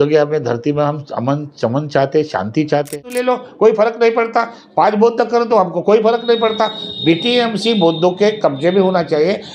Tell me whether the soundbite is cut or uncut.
cut